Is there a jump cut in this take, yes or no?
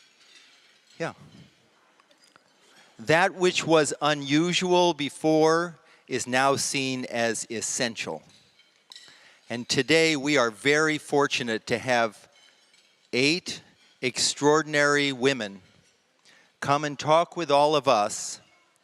no